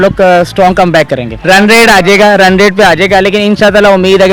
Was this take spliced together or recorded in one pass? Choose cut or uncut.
cut